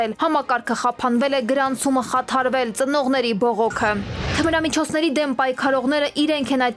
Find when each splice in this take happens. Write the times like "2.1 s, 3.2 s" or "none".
4.2 s